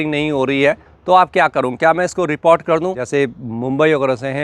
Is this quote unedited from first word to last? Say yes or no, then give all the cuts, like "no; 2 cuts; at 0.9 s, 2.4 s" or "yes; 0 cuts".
no; 1 cut; at 3.0 s